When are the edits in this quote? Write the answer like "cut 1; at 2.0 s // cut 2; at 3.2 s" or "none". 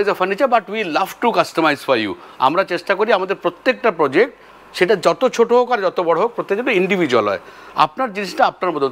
none